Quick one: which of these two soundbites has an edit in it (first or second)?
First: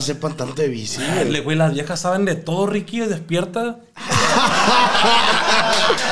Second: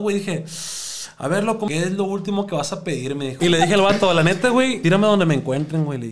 second